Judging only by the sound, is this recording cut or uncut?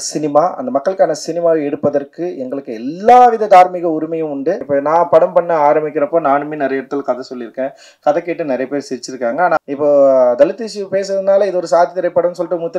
cut